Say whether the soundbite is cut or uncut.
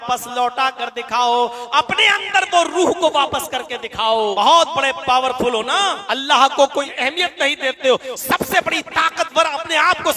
cut